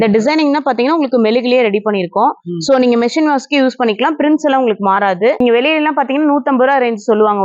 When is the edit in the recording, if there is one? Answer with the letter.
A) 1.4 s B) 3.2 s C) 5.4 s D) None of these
C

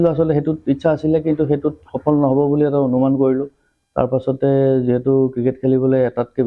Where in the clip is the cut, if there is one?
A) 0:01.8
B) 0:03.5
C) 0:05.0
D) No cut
D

